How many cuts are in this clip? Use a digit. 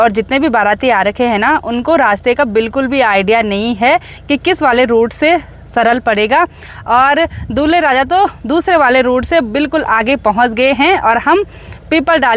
0